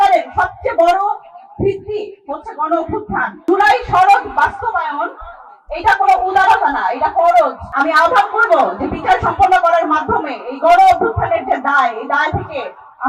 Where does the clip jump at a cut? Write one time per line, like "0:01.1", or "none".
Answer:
0:03.4
0:07.6

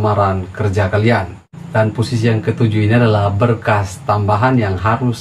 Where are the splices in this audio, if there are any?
none

